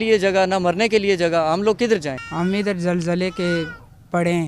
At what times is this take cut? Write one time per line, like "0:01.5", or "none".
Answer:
0:02.2